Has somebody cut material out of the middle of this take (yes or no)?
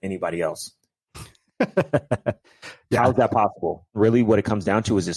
yes